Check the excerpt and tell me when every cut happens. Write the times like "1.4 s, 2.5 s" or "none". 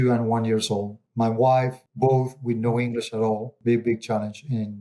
1.0 s, 1.8 s, 3.5 s